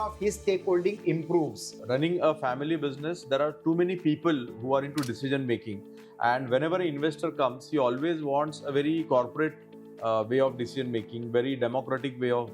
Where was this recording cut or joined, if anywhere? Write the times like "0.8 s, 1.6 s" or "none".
1.7 s